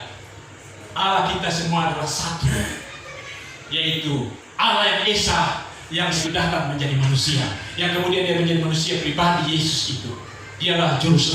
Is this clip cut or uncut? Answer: cut